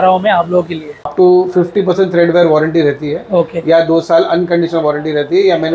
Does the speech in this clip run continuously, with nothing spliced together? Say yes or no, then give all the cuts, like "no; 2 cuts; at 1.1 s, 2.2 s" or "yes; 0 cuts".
no; 1 cut; at 1.1 s